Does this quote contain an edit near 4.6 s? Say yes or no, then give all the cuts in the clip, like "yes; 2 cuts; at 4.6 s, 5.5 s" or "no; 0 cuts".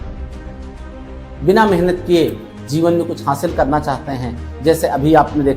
no; 1 cut; at 1.4 s